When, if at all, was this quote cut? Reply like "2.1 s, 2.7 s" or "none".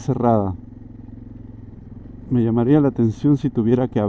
2.0 s

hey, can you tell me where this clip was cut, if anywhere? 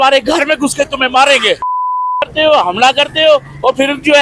1.6 s

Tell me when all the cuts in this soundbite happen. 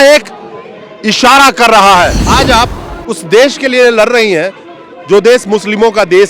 2.2 s

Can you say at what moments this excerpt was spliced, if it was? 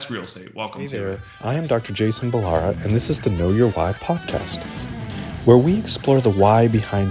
0.9 s

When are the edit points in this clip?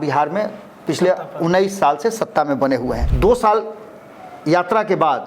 3.1 s

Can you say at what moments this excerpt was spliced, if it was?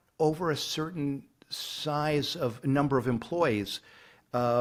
none

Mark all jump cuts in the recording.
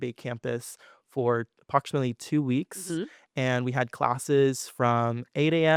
none

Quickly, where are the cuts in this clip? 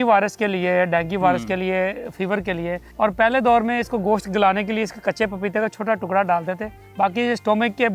2.9 s, 6.8 s

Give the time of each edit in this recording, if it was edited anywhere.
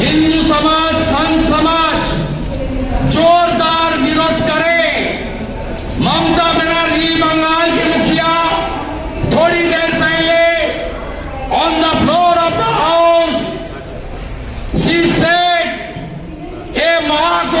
none

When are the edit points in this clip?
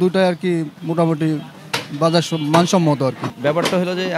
3.3 s

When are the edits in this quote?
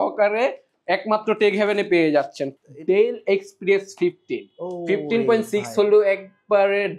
2.5 s

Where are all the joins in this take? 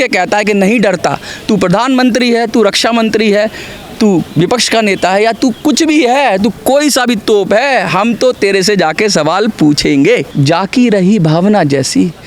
10.3 s

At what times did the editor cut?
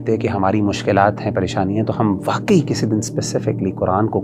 none

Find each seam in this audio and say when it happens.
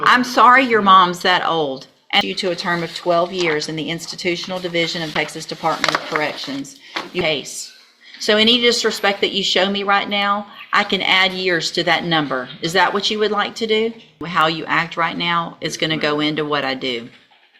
2.2 s, 7.2 s, 14.3 s

